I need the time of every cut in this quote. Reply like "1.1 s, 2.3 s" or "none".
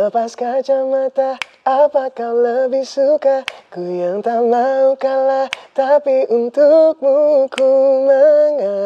none

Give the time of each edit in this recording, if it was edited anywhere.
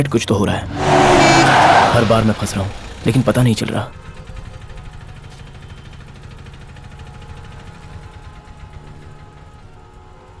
none

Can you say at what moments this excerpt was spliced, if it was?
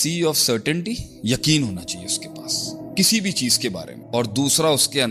3.9 s

